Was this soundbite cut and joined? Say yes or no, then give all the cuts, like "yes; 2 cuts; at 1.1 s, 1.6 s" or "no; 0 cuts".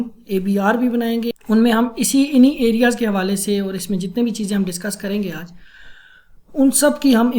yes; 1 cut; at 1.4 s